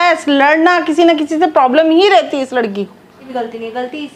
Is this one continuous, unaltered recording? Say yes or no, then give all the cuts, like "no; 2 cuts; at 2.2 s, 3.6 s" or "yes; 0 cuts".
no; 1 cut; at 3.3 s